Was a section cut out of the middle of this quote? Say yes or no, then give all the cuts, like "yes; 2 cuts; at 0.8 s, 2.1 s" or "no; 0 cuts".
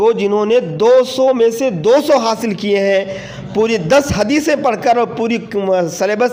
no; 0 cuts